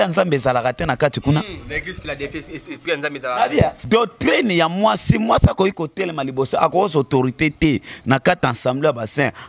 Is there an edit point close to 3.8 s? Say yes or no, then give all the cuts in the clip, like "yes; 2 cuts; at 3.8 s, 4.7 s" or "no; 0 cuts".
yes; 1 cut; at 3.8 s